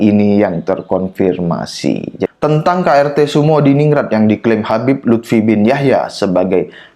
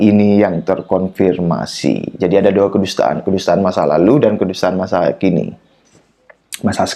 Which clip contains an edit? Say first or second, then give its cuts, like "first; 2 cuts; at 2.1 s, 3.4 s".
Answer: first; 1 cut; at 2.2 s